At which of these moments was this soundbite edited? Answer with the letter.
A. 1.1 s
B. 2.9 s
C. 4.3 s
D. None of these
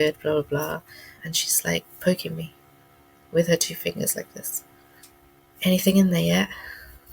A